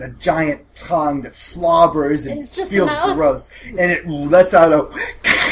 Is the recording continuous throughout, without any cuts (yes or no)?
yes